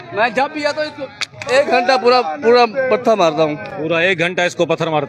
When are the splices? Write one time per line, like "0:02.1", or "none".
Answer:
none